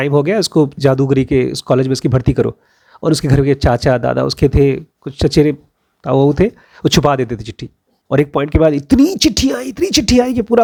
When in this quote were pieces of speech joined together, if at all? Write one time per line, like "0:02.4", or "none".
none